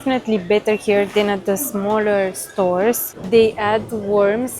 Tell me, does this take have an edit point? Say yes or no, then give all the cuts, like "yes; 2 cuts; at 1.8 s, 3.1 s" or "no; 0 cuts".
yes; 1 cut; at 3.1 s